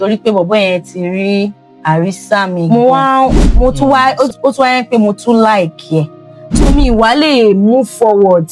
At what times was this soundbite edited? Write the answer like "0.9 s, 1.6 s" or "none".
2.7 s

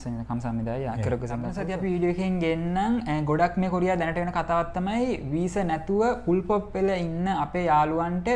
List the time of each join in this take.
1.6 s

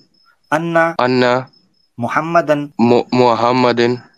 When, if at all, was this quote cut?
0.9 s, 2.7 s

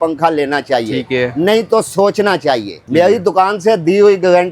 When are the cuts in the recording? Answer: 2.8 s

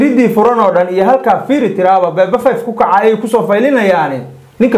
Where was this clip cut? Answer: none

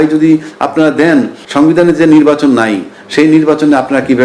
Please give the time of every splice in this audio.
1.4 s

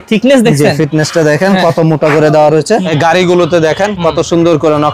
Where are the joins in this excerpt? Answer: 2.9 s

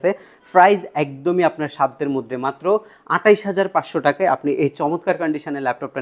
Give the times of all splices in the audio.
none

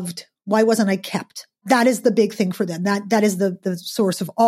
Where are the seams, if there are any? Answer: 1.6 s

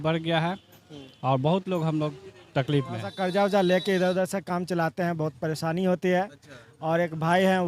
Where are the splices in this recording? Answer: 3.1 s

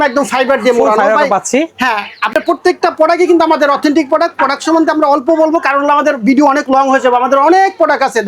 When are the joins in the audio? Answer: none

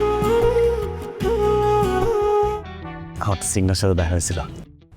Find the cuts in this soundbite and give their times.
2.5 s

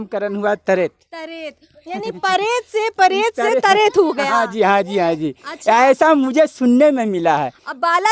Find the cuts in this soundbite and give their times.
none

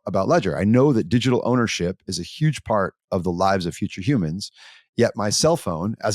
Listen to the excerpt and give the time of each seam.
none

